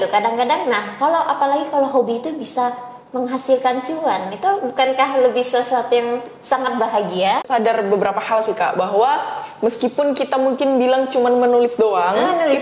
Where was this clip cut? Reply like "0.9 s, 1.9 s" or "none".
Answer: 7.4 s